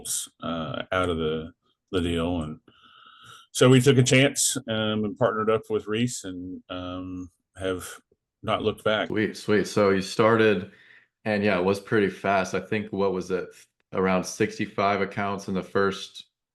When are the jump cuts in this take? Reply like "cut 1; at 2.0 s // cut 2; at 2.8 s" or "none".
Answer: cut 1; at 9.1 s